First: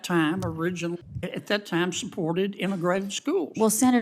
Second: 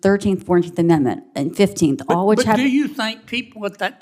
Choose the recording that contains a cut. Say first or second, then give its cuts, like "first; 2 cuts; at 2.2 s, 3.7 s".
first; 1 cut; at 1.1 s